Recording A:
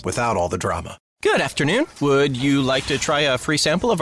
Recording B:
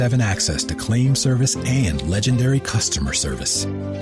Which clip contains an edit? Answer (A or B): A